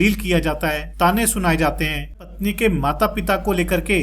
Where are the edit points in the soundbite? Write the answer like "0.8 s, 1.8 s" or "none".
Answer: 0.8 s, 2.3 s